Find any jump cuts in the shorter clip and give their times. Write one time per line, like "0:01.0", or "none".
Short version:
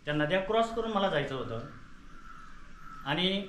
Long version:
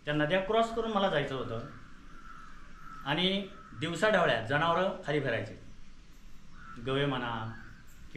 none